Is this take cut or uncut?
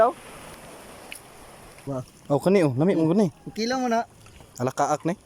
cut